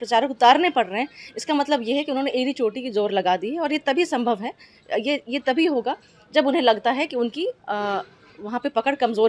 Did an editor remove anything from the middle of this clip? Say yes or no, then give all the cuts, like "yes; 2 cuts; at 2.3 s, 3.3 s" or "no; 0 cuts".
no; 0 cuts